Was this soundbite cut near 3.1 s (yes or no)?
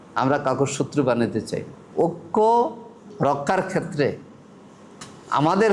no